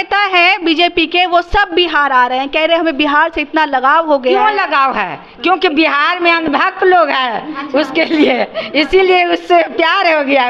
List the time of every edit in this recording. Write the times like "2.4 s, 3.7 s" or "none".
none